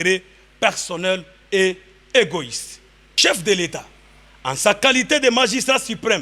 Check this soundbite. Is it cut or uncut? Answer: cut